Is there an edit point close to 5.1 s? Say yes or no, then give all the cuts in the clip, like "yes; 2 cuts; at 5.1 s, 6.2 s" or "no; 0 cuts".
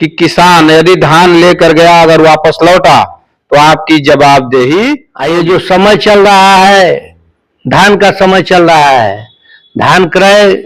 yes; 1 cut; at 5.1 s